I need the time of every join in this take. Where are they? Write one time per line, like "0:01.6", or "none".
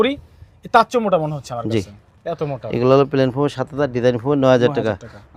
none